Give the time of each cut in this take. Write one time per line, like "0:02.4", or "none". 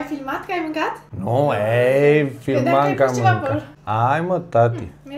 0:01.1
0:03.7